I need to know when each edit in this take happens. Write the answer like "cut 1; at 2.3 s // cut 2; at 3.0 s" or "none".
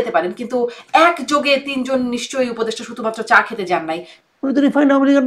cut 1; at 4.1 s